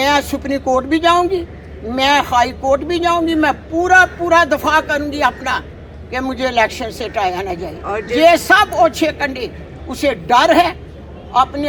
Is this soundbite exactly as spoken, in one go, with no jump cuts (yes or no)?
yes